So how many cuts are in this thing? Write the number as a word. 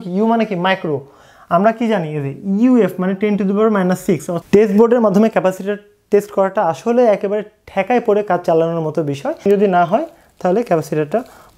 two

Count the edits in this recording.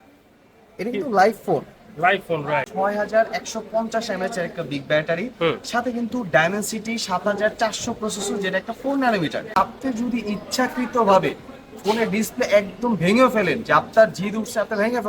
two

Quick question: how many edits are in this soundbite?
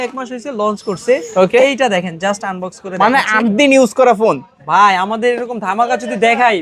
zero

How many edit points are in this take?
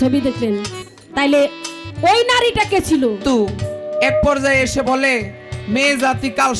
one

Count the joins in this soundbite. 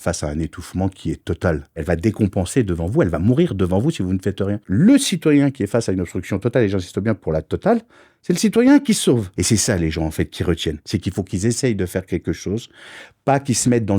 three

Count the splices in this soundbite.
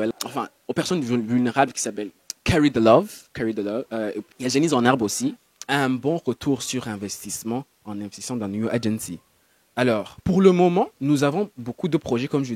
one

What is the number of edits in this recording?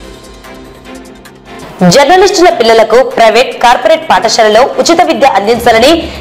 one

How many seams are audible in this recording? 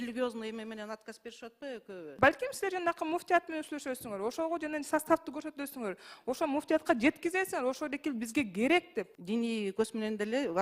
two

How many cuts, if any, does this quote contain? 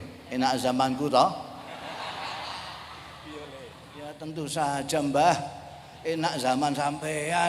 one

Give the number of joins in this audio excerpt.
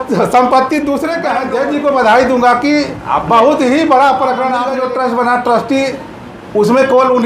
two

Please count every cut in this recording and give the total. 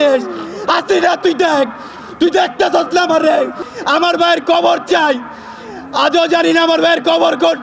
one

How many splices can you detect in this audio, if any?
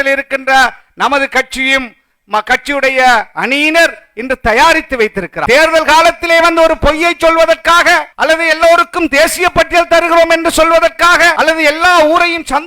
two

